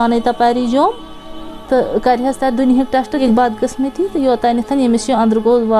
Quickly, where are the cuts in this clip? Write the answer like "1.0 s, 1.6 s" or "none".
3.2 s